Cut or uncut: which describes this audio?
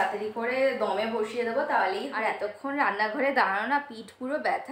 cut